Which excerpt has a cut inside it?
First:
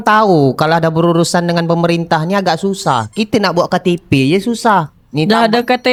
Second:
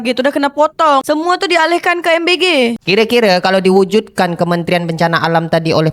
second; 1 cut; at 2.8 s

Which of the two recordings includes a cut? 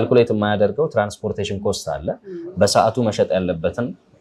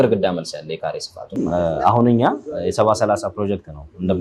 second; 1 cut; at 1.6 s

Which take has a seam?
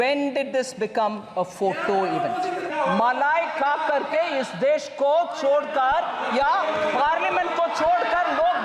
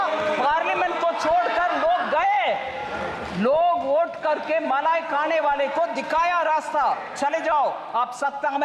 first; 1 cut; at 2.7 s

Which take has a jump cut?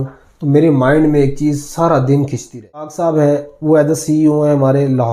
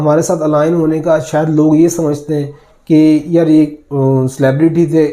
first; 1 cut; at 2.9 s

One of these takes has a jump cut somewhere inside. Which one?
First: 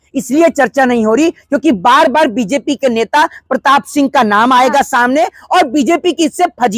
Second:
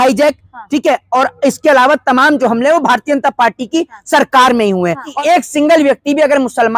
second; 1 cut; at 5.1 s

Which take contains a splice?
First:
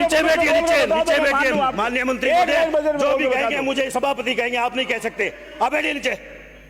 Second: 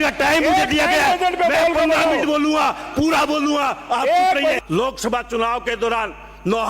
second; 1 cut; at 4.6 s

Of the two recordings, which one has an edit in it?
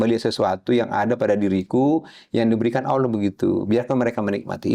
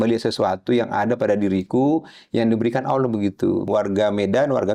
second; 1 cut; at 3.6 s

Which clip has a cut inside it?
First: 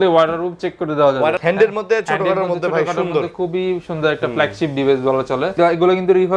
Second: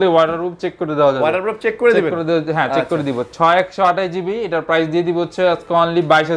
first; 2 cuts; at 1.4 s, 5.5 s

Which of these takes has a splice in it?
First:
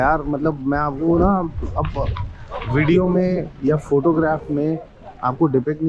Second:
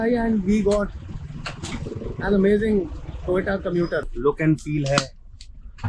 second; 1 cut; at 4.1 s

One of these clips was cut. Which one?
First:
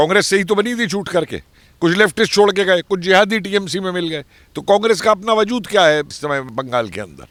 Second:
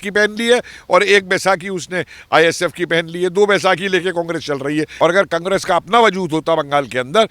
second; 1 cut; at 4.9 s

